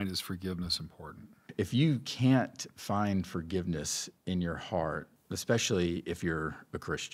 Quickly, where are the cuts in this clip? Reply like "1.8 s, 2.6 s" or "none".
1.4 s, 5.1 s